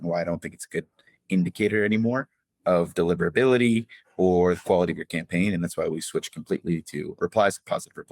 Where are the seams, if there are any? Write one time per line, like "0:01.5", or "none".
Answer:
0:07.1